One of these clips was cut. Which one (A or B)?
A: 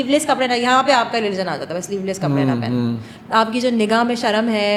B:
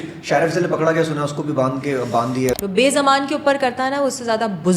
B